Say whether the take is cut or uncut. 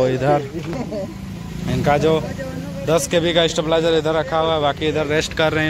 uncut